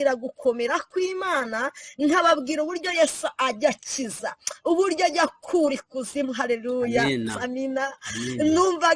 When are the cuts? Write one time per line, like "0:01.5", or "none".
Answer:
none